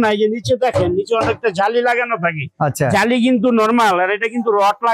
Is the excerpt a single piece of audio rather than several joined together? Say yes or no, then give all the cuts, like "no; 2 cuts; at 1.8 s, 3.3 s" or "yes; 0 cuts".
yes; 0 cuts